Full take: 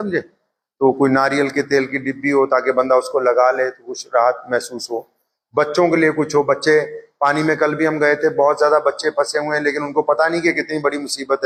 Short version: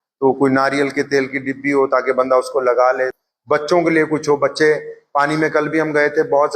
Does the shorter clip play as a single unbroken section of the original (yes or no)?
no